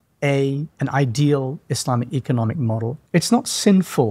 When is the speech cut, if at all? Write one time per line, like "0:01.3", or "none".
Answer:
0:03.0

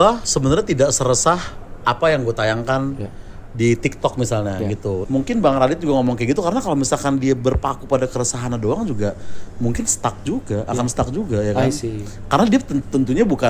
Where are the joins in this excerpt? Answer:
0:05.0

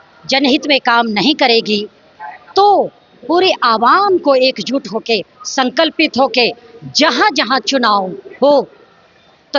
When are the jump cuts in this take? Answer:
none

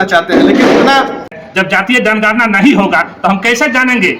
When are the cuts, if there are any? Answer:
0:01.3

